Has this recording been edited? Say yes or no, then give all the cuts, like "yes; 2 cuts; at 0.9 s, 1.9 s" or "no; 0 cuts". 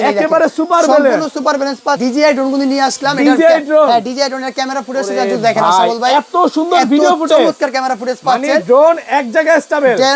yes; 1 cut; at 2.0 s